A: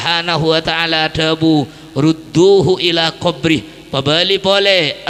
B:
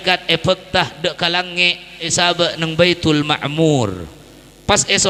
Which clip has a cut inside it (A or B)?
B